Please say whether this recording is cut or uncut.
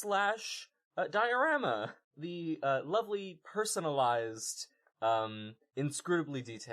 cut